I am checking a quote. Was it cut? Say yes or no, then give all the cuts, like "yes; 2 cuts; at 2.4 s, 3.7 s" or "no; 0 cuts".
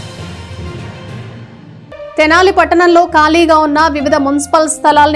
yes; 1 cut; at 1.7 s